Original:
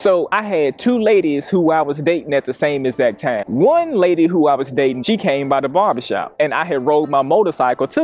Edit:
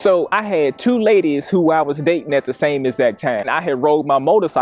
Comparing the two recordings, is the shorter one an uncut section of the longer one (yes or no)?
no